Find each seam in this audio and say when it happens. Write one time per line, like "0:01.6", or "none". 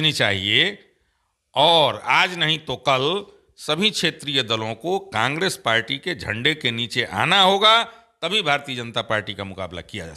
none